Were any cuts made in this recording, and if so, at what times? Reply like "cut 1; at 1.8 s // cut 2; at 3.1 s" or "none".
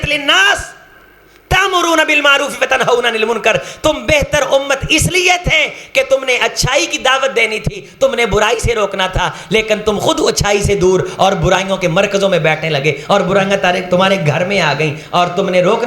none